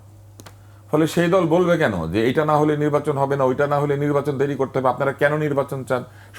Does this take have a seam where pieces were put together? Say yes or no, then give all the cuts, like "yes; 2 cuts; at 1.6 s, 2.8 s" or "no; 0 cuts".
no; 0 cuts